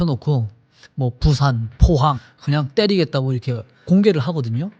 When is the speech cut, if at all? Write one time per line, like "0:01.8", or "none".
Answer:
0:02.2
0:03.8